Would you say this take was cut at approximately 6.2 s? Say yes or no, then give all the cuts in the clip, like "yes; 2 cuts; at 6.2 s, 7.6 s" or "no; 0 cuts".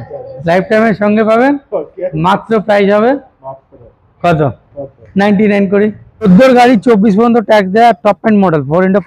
yes; 1 cut; at 6.2 s